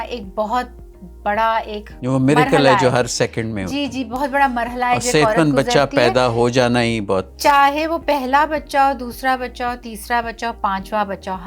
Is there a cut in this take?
no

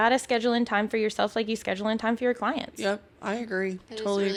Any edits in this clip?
no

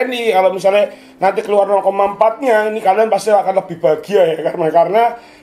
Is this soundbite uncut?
yes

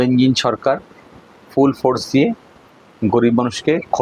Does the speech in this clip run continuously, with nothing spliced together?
yes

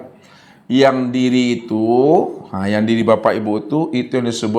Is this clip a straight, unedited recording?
yes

